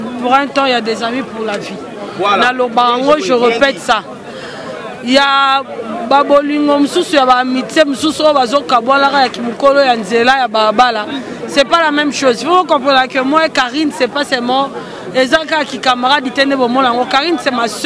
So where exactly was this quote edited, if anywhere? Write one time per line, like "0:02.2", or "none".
none